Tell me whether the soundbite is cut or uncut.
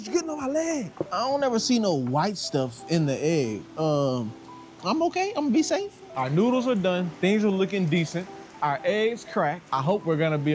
uncut